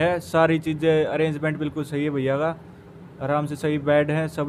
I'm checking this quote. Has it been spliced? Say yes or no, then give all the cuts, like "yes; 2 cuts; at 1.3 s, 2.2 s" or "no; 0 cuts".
no; 0 cuts